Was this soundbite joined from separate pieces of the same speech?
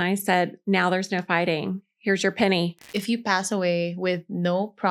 yes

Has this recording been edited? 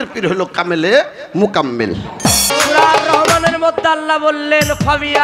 yes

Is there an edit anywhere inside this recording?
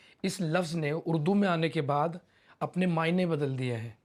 no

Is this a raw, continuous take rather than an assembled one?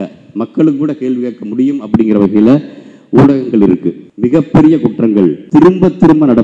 no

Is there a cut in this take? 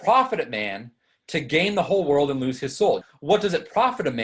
yes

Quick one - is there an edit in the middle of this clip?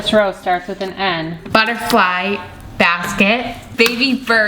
yes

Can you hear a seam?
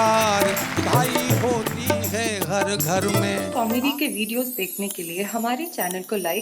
yes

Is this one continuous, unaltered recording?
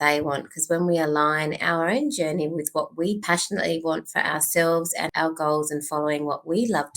no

